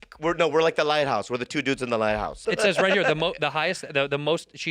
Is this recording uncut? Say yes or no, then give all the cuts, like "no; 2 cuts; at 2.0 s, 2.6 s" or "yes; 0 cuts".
no; 1 cut; at 2.3 s